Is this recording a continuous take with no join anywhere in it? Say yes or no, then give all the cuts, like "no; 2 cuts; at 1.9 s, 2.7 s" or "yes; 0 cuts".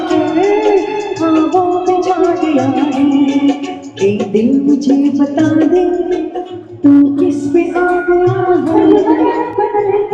no; 1 cut; at 9.1 s